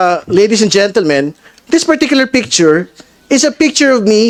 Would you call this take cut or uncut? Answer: uncut